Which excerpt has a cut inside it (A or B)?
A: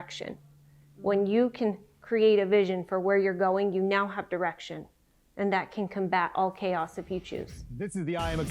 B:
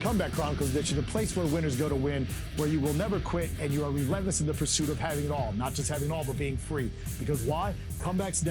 A